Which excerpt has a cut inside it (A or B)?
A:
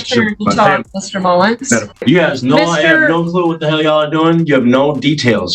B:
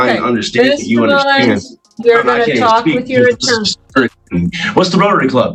A